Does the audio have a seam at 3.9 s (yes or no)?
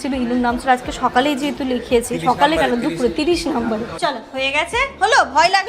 yes